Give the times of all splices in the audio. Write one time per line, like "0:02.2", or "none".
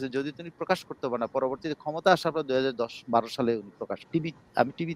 0:04.0